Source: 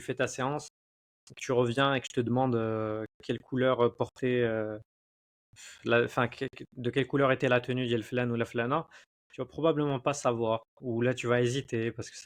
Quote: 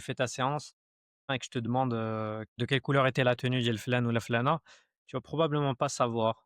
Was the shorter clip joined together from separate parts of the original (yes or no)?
yes